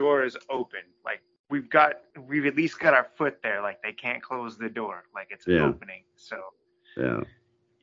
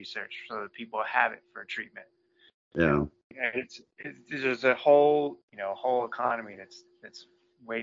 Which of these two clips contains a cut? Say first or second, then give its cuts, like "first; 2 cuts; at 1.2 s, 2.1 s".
second; 1 cut; at 5.5 s